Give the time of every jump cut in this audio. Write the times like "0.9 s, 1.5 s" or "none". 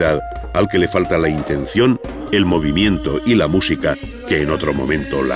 none